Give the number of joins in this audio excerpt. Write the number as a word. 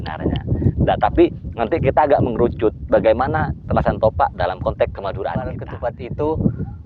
one